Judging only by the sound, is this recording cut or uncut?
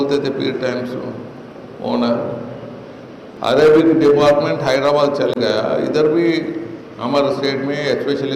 cut